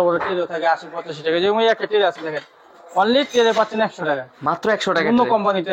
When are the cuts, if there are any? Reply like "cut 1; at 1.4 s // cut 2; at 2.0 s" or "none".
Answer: none